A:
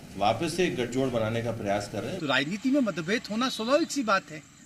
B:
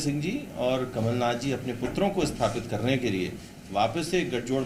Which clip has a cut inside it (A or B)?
A